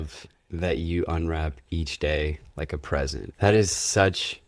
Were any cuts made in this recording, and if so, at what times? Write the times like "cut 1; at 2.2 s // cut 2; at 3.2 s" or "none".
cut 1; at 3.2 s